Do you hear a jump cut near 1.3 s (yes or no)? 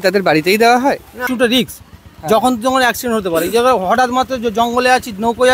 yes